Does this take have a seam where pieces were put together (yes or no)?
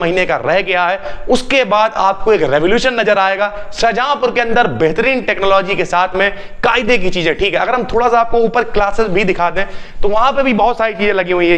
no